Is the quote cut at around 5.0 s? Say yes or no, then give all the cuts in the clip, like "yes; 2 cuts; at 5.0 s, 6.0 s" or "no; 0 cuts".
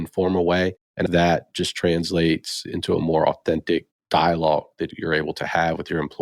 yes; 3 cuts; at 1.1 s, 2.6 s, 5.0 s